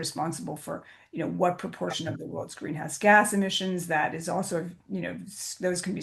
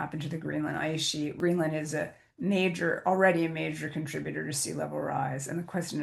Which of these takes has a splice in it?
second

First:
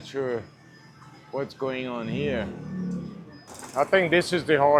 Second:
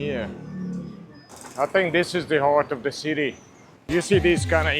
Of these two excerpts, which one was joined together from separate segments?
second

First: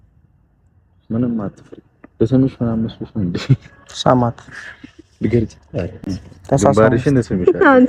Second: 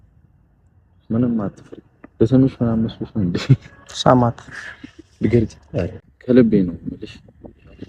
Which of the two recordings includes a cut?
second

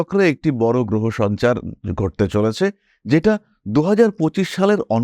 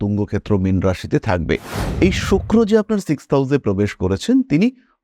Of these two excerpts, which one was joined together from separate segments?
second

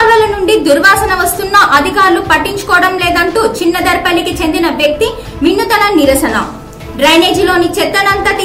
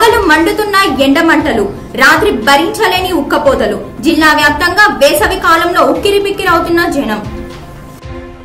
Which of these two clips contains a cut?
second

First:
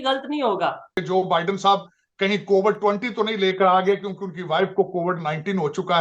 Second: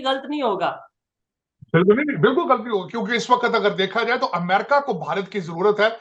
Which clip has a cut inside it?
first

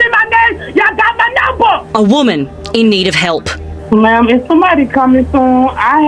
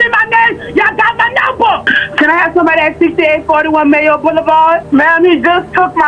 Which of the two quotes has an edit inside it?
second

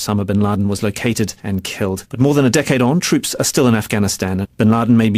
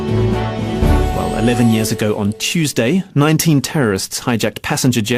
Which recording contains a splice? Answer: first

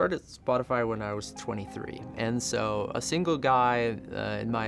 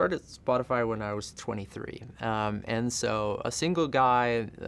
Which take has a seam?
first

